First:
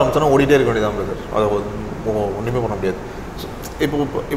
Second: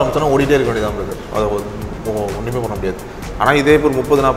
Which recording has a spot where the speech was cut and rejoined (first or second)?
second